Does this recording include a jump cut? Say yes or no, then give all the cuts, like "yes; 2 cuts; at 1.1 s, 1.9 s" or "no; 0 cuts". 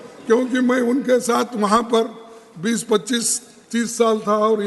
no; 0 cuts